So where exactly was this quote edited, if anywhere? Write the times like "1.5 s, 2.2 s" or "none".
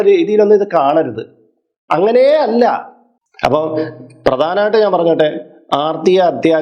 3.1 s

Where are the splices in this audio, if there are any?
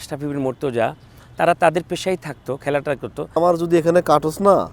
3.4 s

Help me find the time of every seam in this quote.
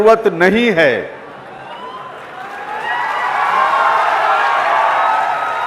none

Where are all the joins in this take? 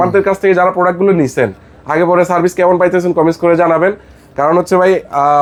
none

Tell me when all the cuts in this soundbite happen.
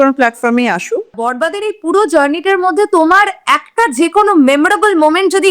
1.2 s

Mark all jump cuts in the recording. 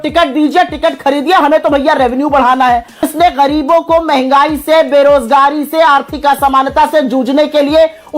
3.1 s

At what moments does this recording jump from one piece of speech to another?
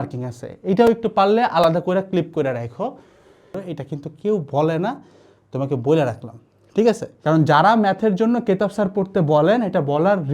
3.6 s, 7.1 s

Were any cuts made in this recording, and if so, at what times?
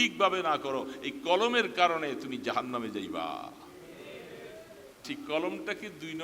5.0 s

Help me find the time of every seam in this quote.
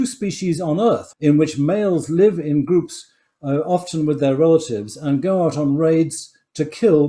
1.1 s

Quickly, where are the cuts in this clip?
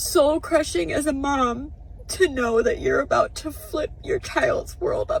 none

